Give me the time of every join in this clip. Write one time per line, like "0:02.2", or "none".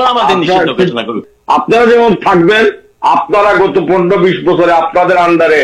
0:01.2